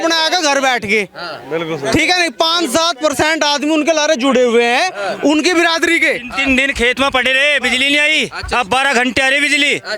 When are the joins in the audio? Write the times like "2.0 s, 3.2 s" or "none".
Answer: none